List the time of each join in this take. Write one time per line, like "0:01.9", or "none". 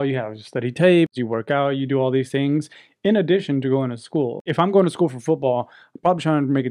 0:01.1
0:04.5